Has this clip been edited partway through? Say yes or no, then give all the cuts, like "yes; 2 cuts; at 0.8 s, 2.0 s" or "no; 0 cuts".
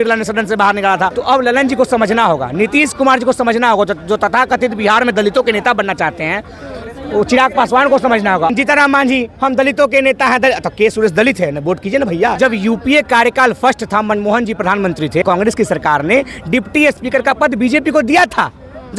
yes; 4 cuts; at 1.2 s, 8.5 s, 12.3 s, 15.2 s